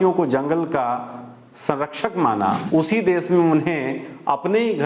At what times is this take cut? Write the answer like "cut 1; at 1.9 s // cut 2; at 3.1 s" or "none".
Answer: cut 1; at 2.6 s